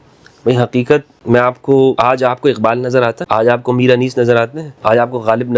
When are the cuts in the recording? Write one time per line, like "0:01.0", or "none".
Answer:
0:01.1
0:02.0
0:03.2
0:04.6